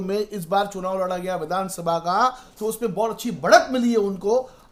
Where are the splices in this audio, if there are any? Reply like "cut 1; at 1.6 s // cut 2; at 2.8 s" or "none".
none